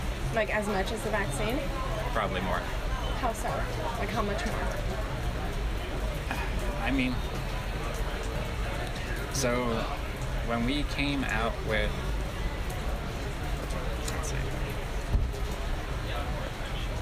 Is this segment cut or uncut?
uncut